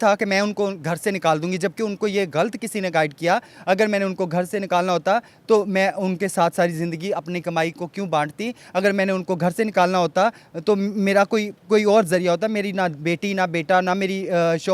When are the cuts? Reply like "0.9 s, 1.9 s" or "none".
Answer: none